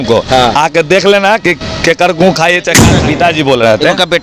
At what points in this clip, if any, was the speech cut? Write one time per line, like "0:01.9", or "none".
0:02.9